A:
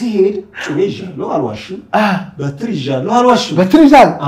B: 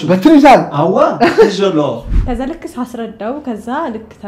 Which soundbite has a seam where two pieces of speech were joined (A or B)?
B